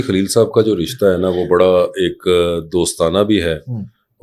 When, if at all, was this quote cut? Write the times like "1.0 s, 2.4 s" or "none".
none